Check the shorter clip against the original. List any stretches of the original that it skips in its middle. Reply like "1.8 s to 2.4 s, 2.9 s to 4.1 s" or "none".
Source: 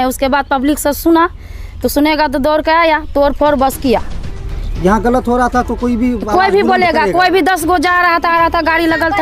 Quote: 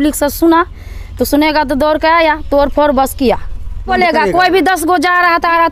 4.5 s to 6.7 s